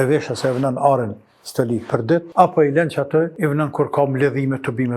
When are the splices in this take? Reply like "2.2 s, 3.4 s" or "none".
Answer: 2.3 s, 3.3 s